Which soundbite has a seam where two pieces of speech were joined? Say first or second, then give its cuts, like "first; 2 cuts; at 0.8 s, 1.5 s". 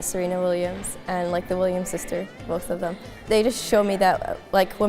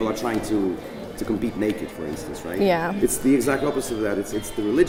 first; 1 cut; at 3.2 s